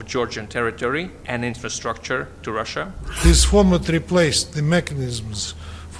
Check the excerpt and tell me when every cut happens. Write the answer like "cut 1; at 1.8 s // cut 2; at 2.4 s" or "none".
cut 1; at 3.0 s